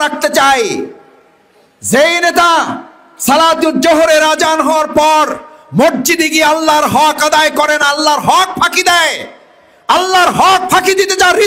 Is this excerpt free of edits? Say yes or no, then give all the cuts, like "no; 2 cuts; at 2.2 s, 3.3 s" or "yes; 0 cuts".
yes; 0 cuts